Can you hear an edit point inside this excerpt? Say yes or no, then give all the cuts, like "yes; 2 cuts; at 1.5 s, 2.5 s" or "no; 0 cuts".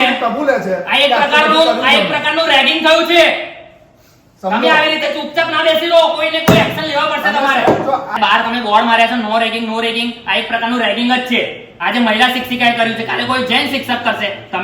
yes; 1 cut; at 8.1 s